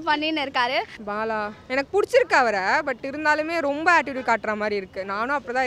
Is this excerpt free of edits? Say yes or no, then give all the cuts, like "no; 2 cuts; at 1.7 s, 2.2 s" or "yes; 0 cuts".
no; 1 cut; at 1.0 s